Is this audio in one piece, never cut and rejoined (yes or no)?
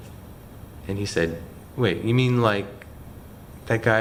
yes